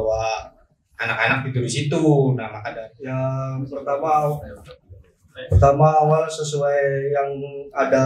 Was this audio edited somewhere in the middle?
yes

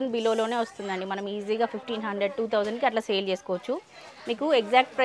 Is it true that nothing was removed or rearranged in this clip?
yes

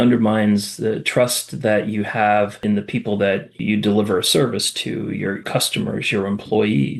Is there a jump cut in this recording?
no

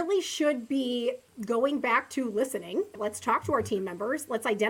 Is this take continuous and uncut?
no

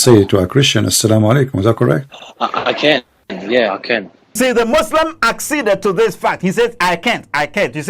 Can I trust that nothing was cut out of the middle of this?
no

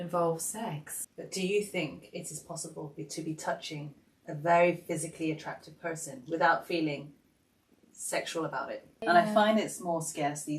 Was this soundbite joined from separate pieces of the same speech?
yes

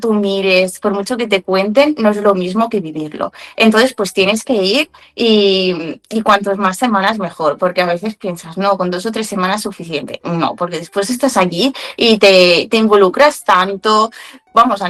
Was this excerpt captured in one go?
yes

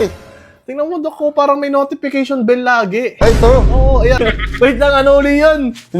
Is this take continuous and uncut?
no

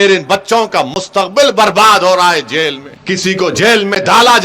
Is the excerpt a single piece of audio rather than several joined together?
no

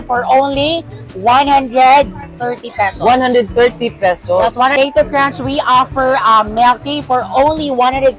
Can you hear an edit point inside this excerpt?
yes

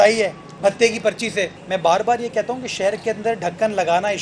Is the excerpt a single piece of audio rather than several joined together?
no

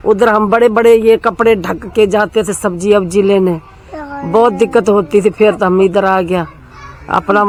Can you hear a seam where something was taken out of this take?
no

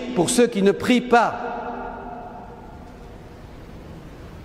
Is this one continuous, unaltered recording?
yes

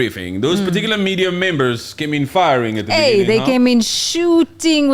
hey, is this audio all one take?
yes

